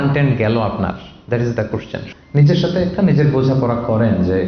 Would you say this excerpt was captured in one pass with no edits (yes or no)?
no